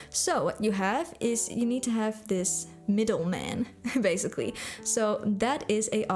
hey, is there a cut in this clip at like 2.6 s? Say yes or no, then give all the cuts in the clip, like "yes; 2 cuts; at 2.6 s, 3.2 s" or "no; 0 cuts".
yes; 1 cut; at 2.6 s